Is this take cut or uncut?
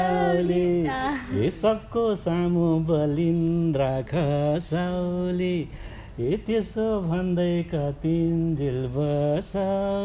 uncut